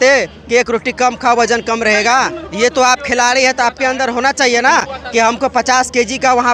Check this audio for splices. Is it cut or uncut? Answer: uncut